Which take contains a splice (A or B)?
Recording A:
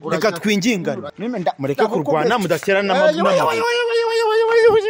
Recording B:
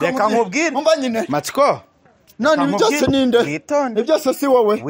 A